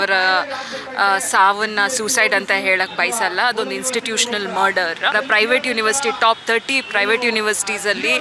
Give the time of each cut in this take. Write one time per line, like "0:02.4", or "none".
0:05.2